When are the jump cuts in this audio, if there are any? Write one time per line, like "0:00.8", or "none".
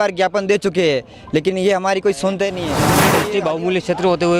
0:03.1